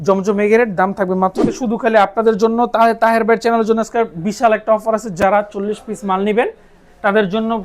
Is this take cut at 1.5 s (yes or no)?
yes